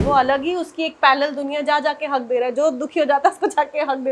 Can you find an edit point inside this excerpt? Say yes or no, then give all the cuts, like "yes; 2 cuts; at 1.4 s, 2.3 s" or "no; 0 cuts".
no; 0 cuts